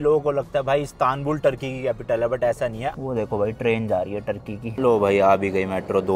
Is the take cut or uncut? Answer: cut